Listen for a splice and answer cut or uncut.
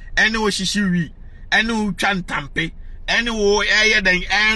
uncut